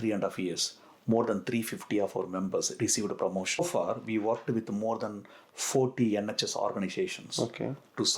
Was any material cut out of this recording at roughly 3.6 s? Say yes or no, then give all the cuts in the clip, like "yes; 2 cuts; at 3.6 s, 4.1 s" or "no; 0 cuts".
yes; 1 cut; at 3.6 s